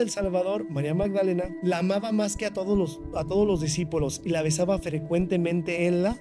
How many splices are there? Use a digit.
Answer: 1